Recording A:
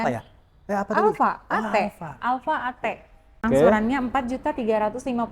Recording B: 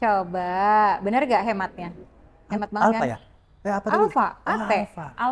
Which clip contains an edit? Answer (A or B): A